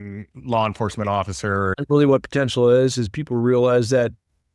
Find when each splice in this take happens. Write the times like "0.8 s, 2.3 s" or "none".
1.7 s